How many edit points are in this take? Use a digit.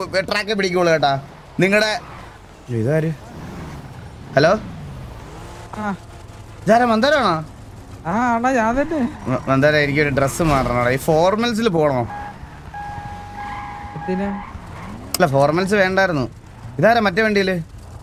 0